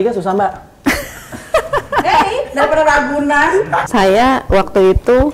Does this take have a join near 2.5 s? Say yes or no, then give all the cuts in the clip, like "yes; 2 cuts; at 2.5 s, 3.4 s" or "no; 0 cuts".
no; 1 cut; at 3.9 s